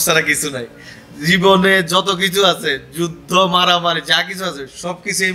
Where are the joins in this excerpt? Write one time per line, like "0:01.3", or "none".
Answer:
none